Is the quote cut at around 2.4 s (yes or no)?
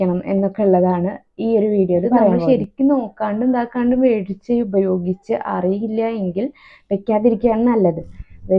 yes